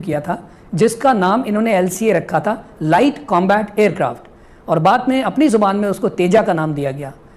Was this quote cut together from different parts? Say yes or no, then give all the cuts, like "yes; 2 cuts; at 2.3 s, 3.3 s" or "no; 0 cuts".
no; 0 cuts